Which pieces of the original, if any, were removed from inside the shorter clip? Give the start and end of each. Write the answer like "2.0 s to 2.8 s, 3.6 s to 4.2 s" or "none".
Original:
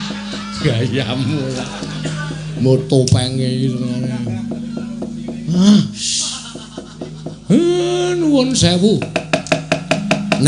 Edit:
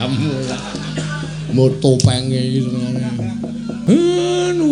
4.9 s to 7.4 s